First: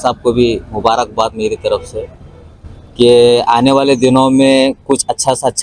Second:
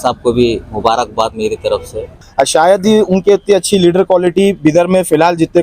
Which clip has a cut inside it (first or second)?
second